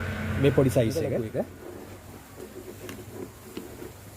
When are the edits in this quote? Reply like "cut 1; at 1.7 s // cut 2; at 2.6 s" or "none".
cut 1; at 1.2 s